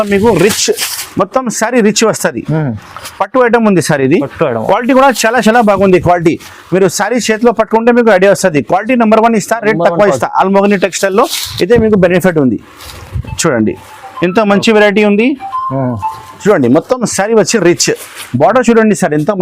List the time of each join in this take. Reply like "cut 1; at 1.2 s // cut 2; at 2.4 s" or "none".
none

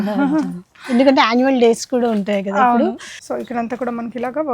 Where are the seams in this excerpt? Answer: cut 1; at 3.1 s

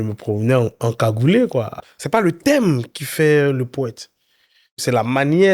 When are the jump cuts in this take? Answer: cut 1; at 1.8 s

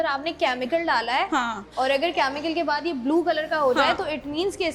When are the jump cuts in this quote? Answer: none

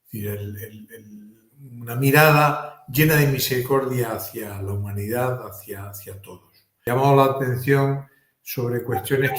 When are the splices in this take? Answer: cut 1; at 6.7 s

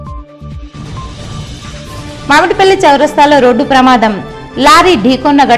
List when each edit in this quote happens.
none

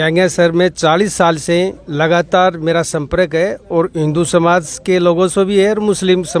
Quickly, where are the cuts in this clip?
none

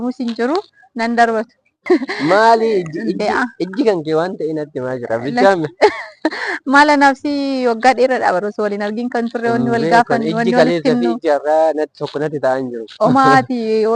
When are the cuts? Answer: cut 1; at 1.8 s

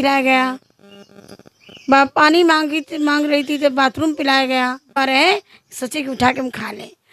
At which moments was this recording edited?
cut 1; at 4.9 s

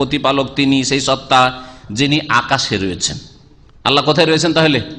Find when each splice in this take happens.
none

